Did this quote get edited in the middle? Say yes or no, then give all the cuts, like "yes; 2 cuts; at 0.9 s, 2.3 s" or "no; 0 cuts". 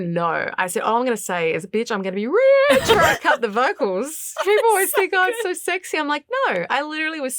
yes; 1 cut; at 3.0 s